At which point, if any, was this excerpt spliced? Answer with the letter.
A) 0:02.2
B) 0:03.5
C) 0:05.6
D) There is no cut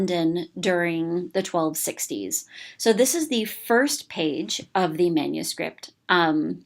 B